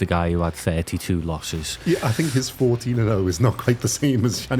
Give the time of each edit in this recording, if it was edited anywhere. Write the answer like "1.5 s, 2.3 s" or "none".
1.8 s